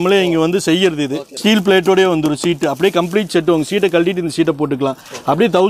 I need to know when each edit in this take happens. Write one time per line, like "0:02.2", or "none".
0:01.3